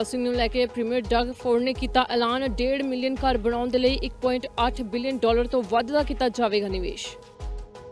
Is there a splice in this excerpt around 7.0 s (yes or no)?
yes